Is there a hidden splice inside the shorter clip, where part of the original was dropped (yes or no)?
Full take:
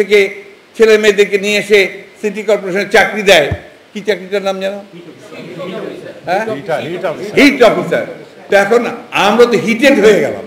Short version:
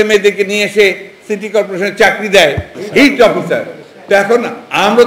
yes